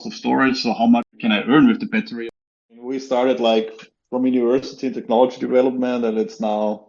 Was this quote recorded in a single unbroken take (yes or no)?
no